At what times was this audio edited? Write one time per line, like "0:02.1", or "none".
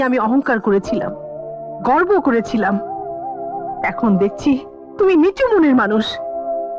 none